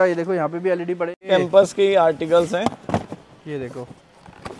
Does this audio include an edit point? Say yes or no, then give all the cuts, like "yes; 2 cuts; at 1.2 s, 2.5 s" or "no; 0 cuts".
yes; 1 cut; at 1.2 s